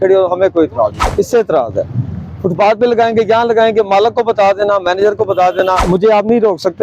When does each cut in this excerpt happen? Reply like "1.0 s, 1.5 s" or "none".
1.0 s, 5.8 s